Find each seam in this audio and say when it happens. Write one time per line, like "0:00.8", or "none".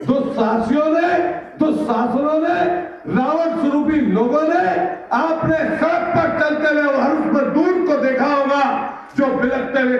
none